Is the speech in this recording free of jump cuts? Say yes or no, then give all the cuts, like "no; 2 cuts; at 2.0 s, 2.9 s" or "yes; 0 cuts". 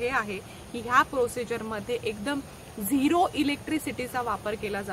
yes; 0 cuts